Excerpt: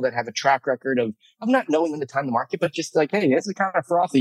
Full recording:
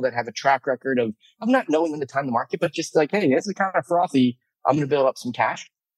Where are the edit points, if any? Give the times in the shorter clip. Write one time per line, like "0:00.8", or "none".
none